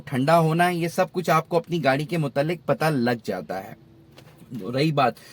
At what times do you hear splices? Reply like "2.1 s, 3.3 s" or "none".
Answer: none

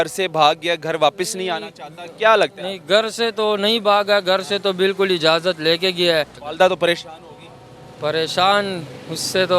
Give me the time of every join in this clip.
6.4 s

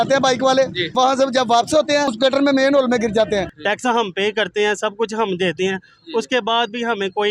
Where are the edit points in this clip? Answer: 0.9 s, 2.1 s, 3.5 s

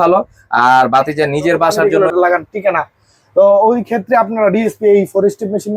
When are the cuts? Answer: 1.8 s

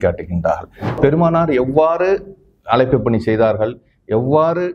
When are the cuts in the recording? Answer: 1.0 s

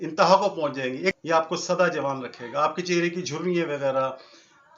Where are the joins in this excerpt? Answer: 1.1 s

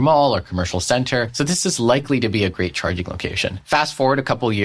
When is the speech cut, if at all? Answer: 1.3 s, 3.6 s

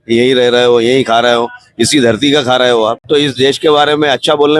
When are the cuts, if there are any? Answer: 3.0 s

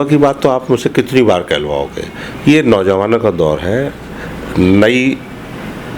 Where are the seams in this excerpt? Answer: none

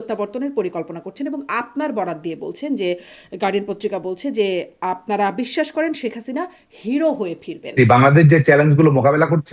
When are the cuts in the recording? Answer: 7.7 s

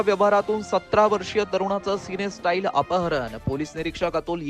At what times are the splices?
none

